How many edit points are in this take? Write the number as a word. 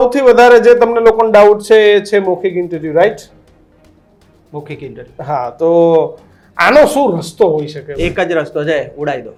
zero